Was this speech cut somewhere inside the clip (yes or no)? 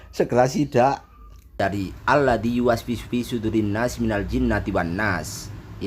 yes